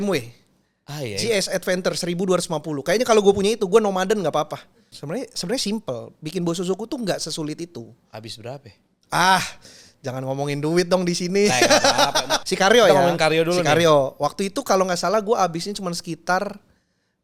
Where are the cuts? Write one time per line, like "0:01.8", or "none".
0:04.9
0:12.4